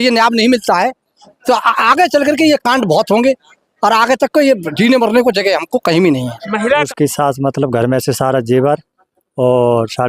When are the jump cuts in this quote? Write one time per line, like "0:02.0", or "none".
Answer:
0:06.9